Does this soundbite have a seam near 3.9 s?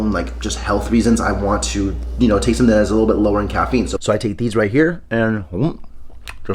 yes; 1 cut; at 3.9 s

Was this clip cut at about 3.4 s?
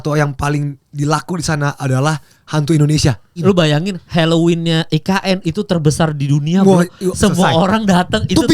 yes; 1 cut; at 3.4 s

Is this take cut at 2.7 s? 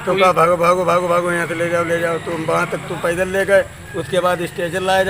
yes; 1 cut; at 2.7 s

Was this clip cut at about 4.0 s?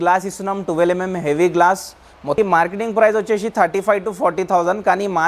no; 1 cut; at 2.4 s

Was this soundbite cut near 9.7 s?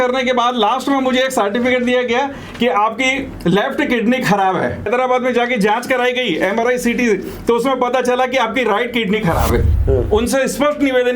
yes; 2 cuts; at 4.9 s, 9.7 s

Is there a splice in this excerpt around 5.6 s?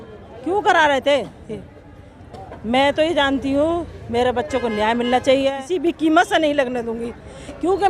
yes; 1 cut; at 5.6 s

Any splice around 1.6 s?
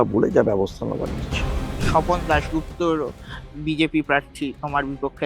yes; 1 cut; at 1.6 s

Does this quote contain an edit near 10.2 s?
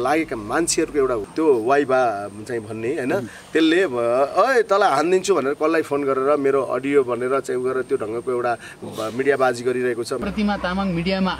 yes; 2 cuts; at 1.2 s, 10.2 s

